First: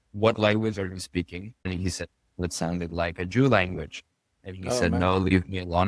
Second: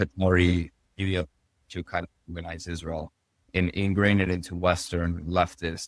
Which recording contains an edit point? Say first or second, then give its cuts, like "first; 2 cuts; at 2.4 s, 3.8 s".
first; 1 cut; at 1.5 s